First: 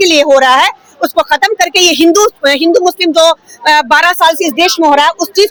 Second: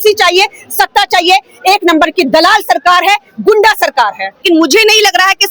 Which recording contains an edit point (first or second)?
second